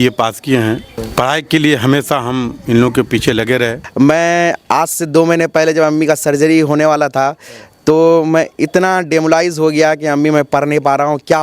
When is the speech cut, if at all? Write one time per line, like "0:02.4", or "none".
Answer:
0:01.0
0:03.8